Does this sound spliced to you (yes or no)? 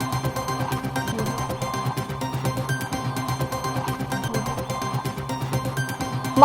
yes